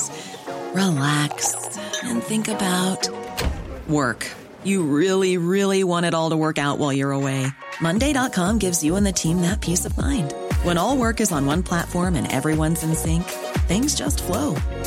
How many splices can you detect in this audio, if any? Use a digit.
0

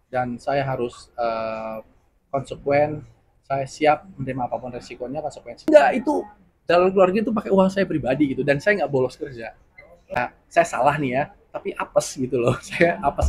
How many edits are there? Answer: 2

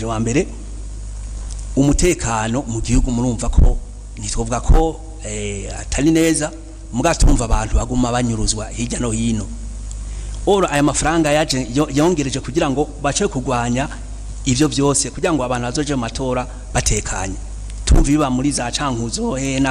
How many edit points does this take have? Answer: 0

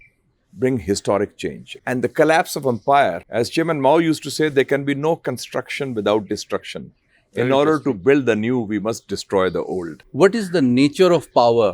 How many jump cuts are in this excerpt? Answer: 3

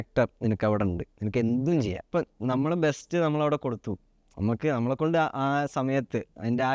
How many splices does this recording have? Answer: 1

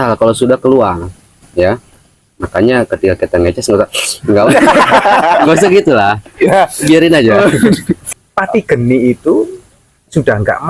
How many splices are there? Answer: 1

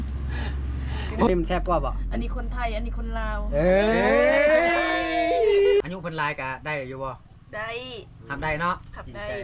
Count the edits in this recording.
2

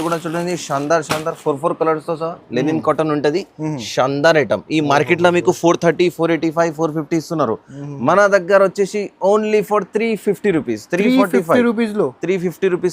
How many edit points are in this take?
1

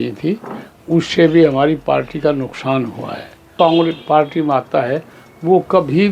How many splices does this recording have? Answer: 1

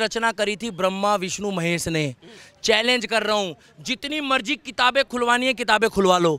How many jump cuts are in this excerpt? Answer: 0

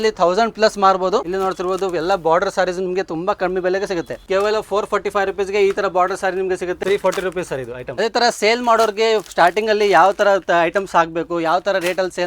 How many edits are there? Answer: 4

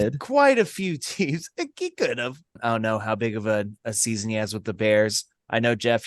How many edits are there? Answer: 1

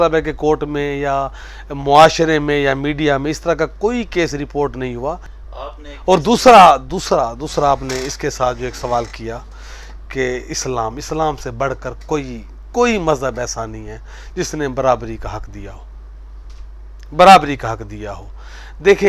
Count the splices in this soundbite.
1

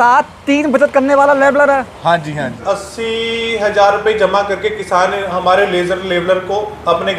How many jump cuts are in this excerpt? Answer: 1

